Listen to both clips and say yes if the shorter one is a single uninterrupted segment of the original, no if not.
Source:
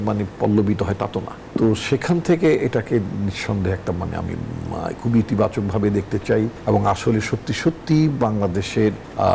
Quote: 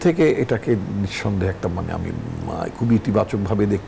yes